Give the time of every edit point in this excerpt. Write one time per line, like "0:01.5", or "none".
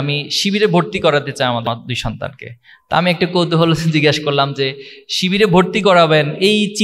0:01.7